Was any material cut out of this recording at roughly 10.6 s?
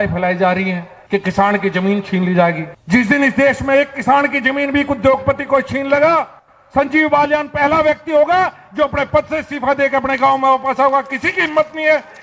no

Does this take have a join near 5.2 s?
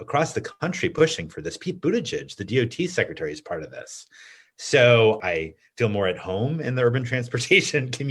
yes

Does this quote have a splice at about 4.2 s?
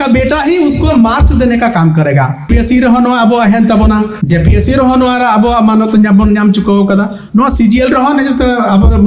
yes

